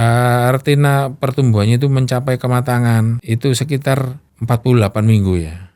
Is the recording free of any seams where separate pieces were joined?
no; 2 cuts; at 3.2 s, 4.3 s

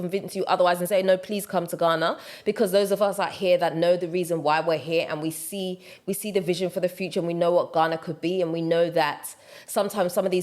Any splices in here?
no; 0 cuts

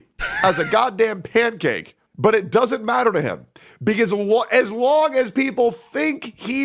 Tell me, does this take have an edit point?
no; 0 cuts

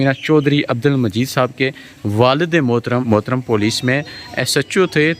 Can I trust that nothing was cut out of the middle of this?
no; 1 cut; at 3.1 s

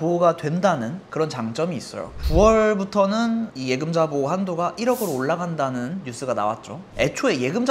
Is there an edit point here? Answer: yes; 2 cuts; at 1.0 s, 6.8 s

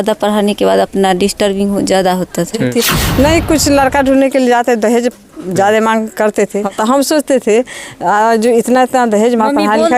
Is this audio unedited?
no; 2 cuts; at 2.7 s, 6.6 s

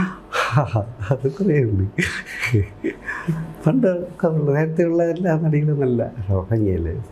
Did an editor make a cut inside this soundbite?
no; 0 cuts

